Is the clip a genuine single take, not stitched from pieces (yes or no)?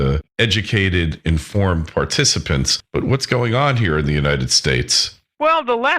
no